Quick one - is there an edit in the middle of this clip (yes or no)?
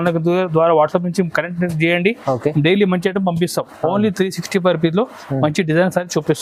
no